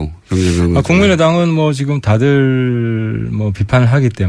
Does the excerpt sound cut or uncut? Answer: cut